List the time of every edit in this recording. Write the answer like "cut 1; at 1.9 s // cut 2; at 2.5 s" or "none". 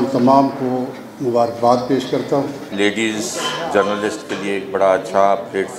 cut 1; at 2.7 s